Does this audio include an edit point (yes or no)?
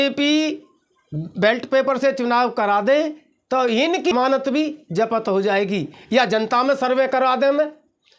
yes